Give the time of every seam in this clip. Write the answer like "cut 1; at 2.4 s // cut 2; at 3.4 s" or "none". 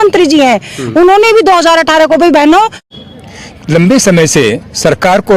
cut 1; at 2.9 s